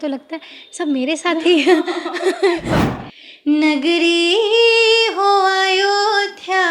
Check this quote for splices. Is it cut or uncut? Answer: cut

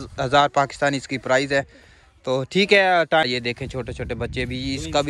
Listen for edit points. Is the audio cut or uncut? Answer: cut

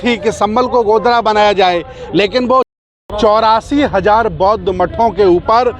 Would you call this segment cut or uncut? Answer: cut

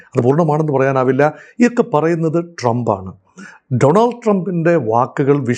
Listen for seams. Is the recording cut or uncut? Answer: uncut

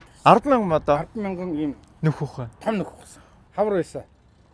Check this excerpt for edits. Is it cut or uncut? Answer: cut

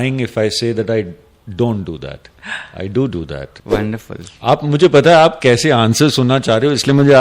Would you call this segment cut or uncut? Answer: cut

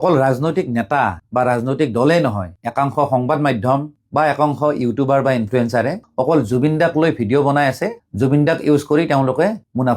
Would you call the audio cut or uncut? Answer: uncut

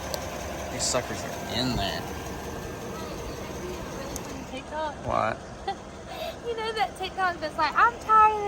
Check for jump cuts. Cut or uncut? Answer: uncut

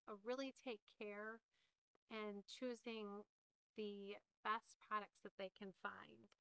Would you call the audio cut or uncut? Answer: uncut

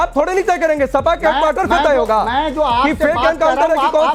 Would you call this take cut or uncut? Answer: uncut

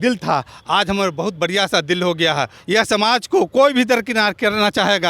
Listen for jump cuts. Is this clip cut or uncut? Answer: cut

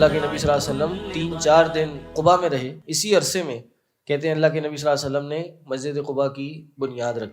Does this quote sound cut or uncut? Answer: cut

